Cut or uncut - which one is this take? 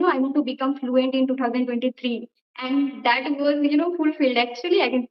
uncut